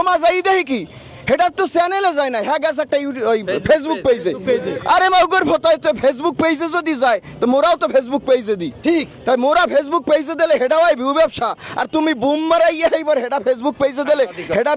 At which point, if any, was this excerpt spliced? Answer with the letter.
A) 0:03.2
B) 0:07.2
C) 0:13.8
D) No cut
D